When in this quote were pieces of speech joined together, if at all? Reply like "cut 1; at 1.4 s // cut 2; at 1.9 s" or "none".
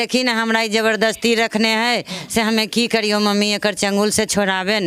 none